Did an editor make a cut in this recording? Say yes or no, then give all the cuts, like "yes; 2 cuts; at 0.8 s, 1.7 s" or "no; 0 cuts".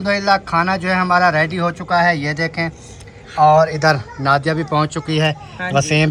no; 0 cuts